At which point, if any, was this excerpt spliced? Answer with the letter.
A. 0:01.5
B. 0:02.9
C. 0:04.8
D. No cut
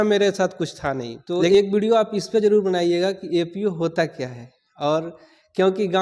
A